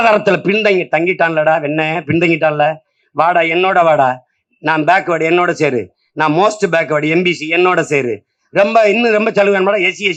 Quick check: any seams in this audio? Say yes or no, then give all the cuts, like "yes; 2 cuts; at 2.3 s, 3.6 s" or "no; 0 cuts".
no; 0 cuts